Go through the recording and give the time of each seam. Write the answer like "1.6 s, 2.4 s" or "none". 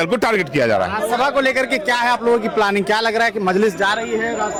none